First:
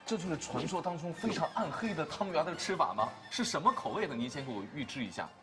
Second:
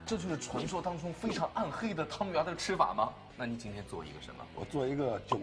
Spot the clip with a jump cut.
second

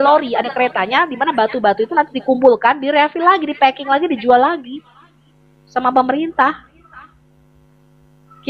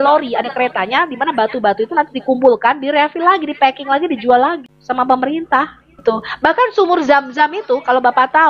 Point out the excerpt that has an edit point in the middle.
second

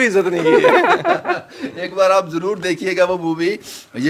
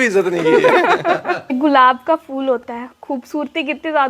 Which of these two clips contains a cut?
second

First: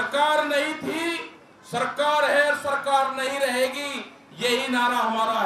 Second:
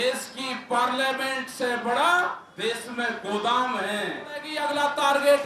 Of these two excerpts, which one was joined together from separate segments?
second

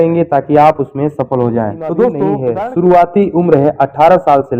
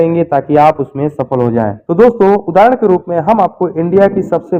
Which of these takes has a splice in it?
first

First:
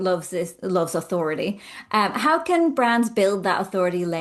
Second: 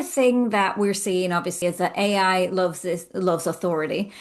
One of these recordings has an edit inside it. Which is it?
second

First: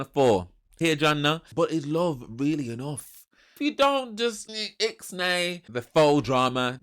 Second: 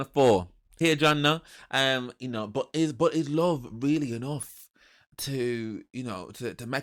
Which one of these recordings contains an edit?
first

